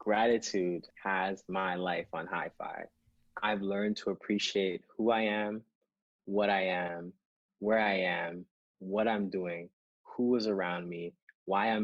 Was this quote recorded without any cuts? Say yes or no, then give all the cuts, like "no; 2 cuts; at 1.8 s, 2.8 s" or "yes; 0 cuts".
no; 1 cut; at 0.9 s